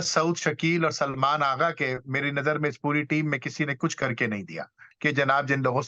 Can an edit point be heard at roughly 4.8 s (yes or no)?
yes